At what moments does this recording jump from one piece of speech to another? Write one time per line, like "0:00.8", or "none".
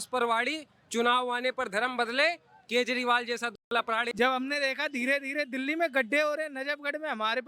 0:03.7